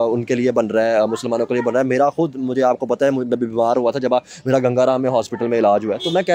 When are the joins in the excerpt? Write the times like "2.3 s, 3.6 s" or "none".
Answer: none